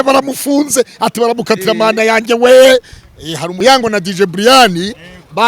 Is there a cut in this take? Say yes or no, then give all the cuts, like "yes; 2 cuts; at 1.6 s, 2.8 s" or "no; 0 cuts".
yes; 1 cut; at 3.5 s